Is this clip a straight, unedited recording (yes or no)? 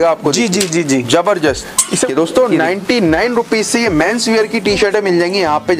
no